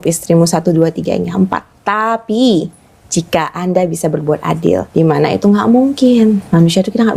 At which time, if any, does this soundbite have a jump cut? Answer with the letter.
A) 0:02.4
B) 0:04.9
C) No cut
B